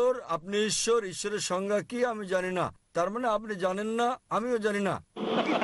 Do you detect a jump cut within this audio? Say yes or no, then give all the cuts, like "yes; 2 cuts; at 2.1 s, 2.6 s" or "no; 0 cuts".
no; 0 cuts